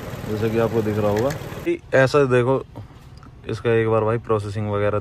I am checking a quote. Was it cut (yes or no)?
yes